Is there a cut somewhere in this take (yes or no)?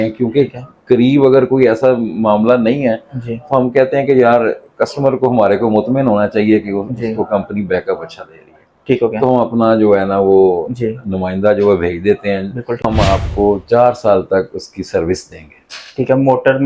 yes